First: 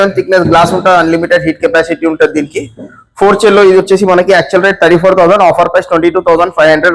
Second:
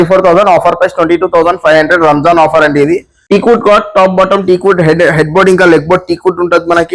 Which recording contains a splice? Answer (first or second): second